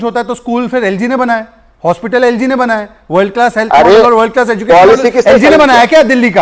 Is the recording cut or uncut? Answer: uncut